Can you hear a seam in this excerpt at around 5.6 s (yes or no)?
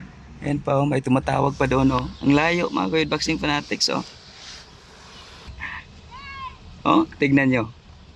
yes